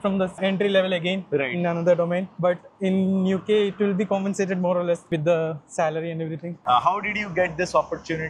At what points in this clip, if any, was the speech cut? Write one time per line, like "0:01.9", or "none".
0:05.0
0:06.6